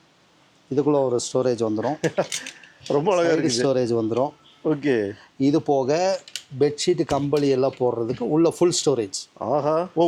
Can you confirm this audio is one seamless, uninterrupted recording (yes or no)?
yes